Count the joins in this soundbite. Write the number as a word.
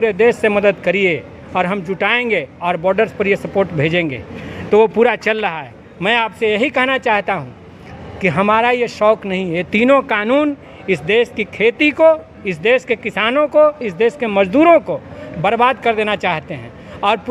zero